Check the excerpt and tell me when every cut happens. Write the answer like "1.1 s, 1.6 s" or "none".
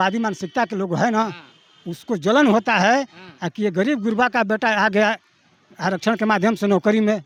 none